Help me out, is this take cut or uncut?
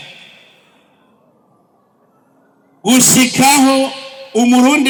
uncut